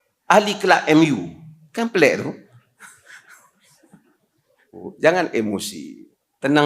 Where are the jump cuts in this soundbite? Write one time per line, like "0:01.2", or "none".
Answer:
0:04.9